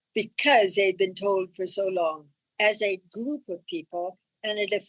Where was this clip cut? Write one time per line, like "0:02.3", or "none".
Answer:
none